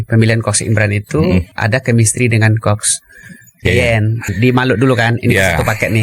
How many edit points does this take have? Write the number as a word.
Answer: two